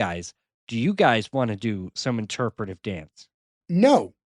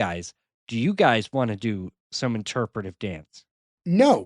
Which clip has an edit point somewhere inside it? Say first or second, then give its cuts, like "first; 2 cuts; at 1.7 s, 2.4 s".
first; 1 cut; at 1.9 s